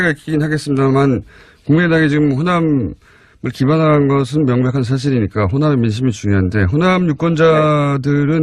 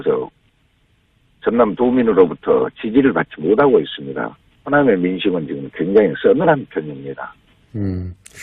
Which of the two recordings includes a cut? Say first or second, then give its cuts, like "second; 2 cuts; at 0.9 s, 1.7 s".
second; 1 cut; at 4.7 s